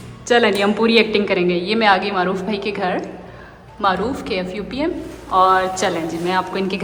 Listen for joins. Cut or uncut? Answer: uncut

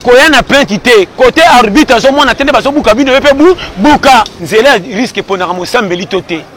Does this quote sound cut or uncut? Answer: cut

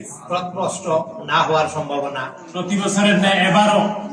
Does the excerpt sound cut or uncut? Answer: cut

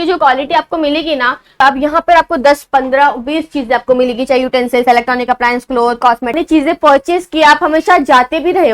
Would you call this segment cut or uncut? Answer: cut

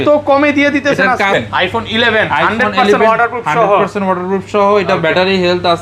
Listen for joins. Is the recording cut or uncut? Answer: cut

